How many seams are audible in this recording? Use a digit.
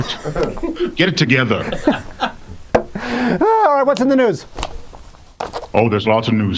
1